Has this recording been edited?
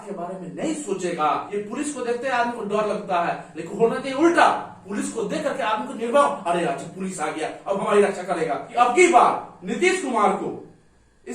yes; 2 cuts; at 1.5 s, 8.6 s

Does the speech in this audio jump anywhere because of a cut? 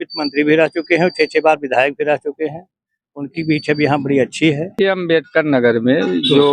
yes; 1 cut; at 4.7 s

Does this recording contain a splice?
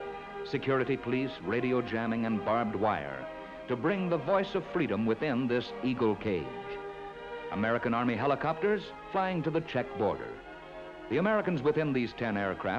yes; 1 cut; at 11.9 s

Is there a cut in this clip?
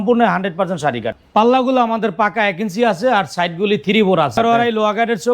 yes; 2 cuts; at 1.1 s, 4.4 s

